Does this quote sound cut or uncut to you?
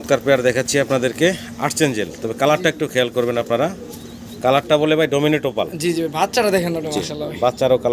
uncut